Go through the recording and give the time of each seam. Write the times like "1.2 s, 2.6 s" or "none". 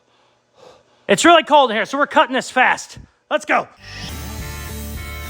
1.0 s, 4.1 s